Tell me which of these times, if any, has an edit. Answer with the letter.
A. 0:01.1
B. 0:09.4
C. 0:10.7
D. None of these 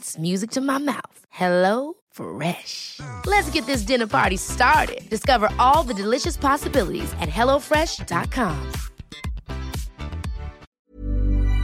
C